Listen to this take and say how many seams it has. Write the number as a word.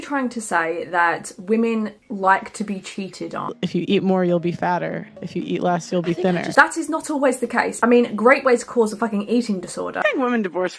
four